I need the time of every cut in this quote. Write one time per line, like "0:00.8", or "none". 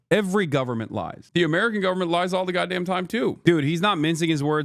0:03.4